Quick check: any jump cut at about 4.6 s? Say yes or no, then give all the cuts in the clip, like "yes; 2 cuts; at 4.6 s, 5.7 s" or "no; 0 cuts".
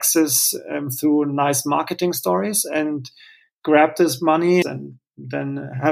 yes; 1 cut; at 4.6 s